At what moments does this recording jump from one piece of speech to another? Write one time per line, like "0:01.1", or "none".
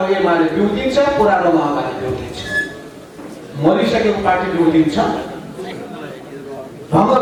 none